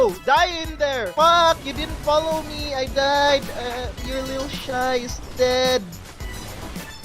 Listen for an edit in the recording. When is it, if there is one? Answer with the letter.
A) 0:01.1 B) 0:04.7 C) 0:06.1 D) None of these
A